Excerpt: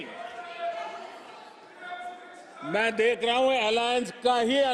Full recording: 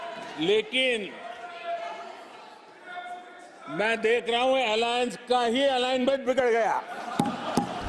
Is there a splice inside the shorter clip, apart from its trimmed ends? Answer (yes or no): no